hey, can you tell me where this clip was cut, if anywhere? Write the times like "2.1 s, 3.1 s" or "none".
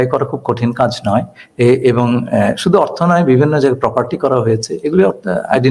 none